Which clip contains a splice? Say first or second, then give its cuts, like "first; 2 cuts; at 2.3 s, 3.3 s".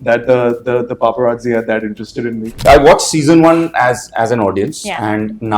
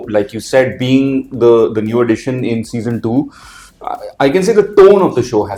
first; 1 cut; at 2.6 s